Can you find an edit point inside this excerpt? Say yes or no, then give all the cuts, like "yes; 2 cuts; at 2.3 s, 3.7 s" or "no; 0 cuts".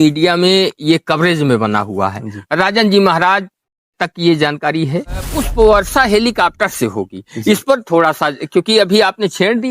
yes; 1 cut; at 5.3 s